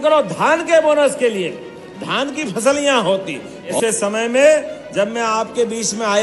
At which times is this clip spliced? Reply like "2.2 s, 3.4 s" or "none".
3.8 s